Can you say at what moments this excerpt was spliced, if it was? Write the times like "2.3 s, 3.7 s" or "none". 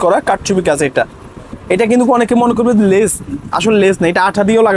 none